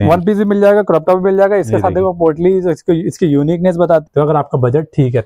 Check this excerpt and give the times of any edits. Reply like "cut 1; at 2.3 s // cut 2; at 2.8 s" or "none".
cut 1; at 4.0 s